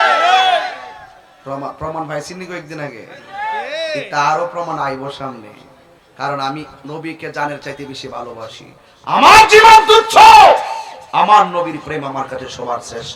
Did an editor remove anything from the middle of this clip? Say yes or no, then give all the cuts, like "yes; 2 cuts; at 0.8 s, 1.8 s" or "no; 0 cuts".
no; 0 cuts